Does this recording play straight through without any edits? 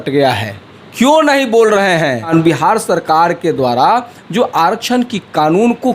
no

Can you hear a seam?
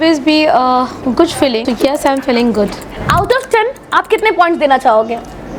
yes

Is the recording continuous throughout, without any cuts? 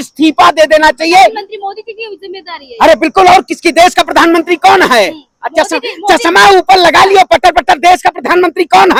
yes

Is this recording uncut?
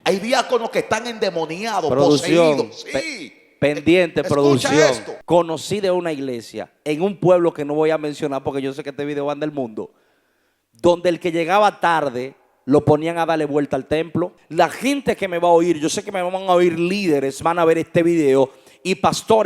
no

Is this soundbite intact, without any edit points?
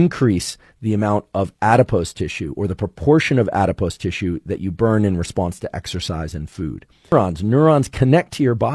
no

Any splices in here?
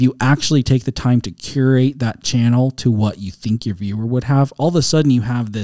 no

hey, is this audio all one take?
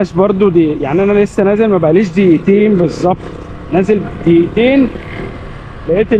yes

